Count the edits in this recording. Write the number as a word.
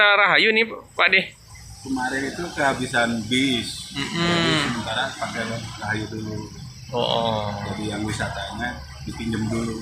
zero